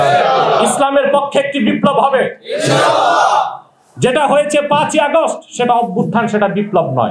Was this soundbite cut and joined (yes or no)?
no